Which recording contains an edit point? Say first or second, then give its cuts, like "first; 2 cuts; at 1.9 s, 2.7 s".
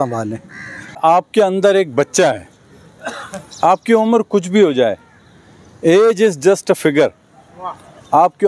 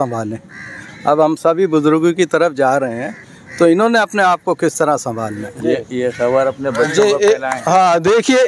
first; 1 cut; at 1.0 s